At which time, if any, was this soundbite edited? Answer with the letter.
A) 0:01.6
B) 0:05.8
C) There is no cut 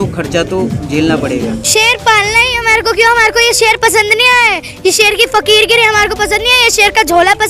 A